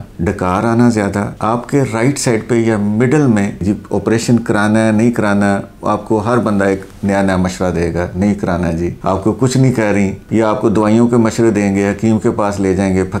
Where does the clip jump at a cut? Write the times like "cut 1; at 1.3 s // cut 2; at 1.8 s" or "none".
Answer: cut 1; at 3.6 s